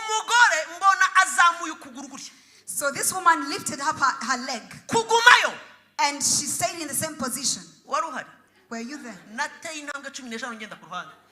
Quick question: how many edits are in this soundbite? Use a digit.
1